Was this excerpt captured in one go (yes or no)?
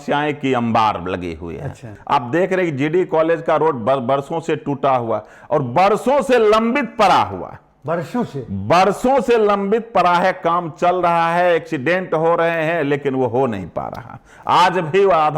no